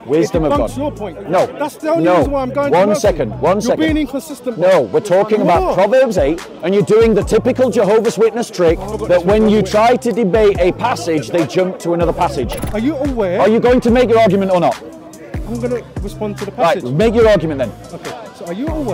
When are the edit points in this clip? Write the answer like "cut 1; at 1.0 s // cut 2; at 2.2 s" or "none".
cut 1; at 8.9 s // cut 2; at 12.6 s